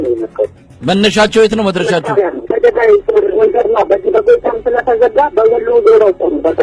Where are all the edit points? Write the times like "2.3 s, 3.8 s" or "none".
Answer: 2.7 s